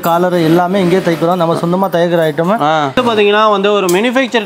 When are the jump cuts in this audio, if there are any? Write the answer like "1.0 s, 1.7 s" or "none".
3.0 s

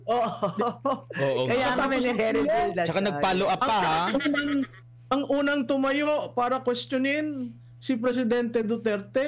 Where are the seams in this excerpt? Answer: none

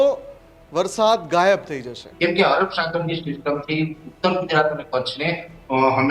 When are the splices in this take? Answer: 2.0 s

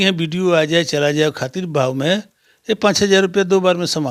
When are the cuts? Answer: none

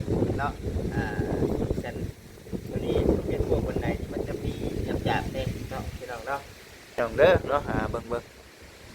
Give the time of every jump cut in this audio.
7.0 s

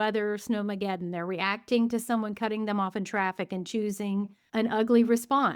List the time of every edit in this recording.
4.4 s

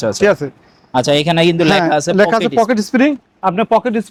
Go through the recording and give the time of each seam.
none

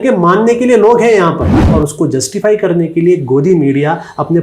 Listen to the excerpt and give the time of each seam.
1.6 s

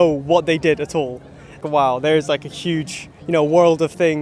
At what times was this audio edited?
1.6 s

